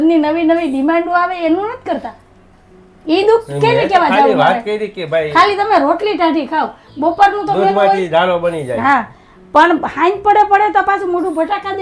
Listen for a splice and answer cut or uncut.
uncut